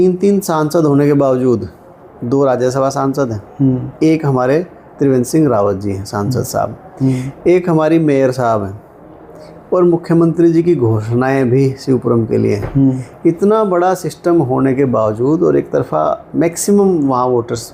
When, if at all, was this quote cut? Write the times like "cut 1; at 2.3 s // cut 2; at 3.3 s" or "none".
none